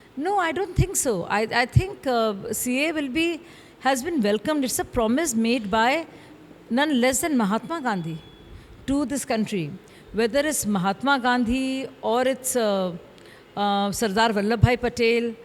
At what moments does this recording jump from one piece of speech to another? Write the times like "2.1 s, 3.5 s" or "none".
none